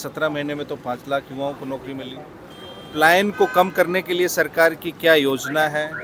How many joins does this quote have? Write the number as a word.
zero